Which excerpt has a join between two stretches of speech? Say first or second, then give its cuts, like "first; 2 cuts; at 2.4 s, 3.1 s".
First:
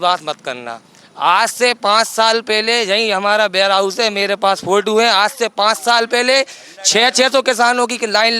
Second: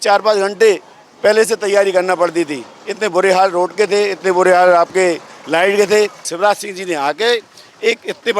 second; 1 cut; at 6.3 s